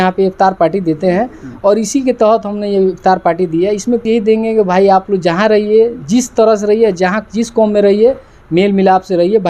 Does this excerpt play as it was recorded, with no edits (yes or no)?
no